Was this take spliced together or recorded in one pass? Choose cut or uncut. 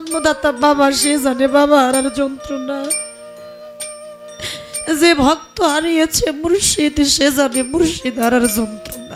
uncut